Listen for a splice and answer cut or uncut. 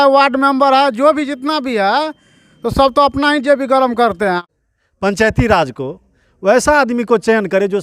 cut